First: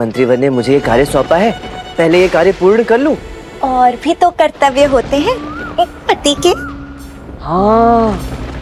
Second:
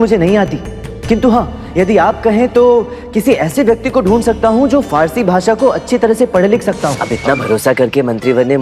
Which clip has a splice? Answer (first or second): second